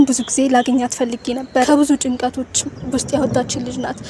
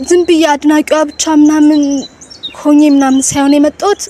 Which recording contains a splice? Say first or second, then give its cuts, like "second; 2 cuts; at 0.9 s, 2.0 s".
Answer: first; 1 cut; at 1.7 s